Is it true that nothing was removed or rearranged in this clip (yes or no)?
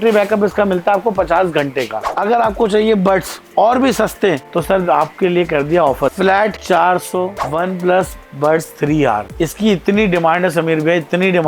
no